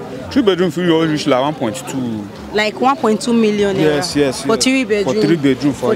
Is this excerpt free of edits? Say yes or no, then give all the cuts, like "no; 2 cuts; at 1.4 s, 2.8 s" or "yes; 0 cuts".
yes; 0 cuts